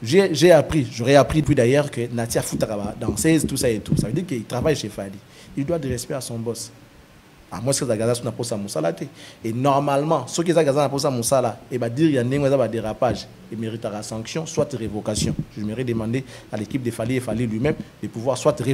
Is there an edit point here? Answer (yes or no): yes